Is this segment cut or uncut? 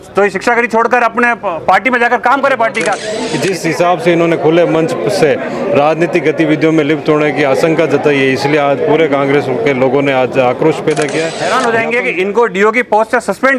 cut